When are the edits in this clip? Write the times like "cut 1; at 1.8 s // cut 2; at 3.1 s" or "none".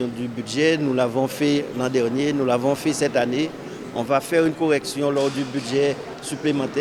none

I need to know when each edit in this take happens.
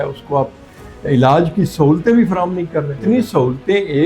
cut 1; at 2.9 s

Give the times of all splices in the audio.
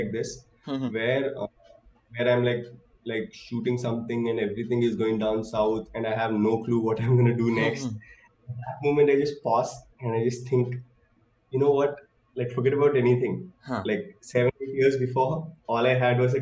none

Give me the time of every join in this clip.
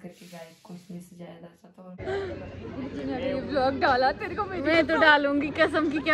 cut 1; at 2.0 s

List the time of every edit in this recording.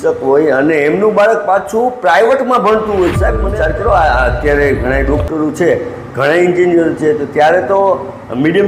cut 1; at 3.4 s

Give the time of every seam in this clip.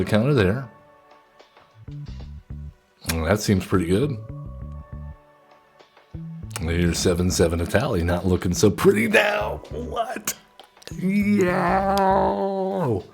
cut 1; at 1.8 s

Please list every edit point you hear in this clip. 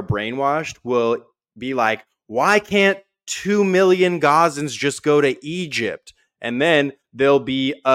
none

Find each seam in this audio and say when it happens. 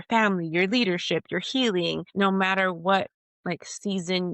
cut 1; at 2.0 s

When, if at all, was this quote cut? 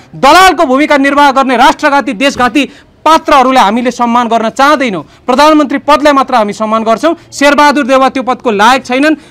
none

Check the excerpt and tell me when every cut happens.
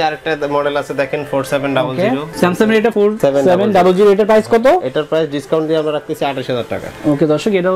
none

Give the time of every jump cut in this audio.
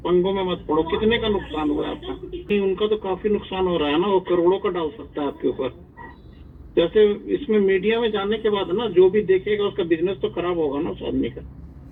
none

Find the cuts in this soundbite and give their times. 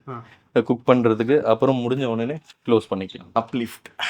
cut 1; at 2.5 s // cut 2; at 3.4 s

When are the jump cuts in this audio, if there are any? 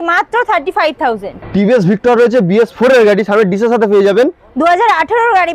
cut 1; at 1.4 s

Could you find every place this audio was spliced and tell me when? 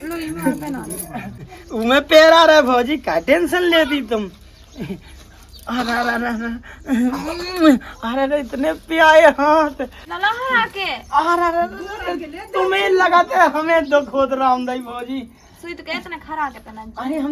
none

